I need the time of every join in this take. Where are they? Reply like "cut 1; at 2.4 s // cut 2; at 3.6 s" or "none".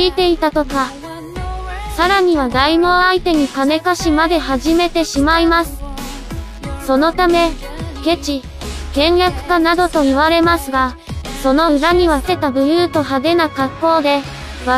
none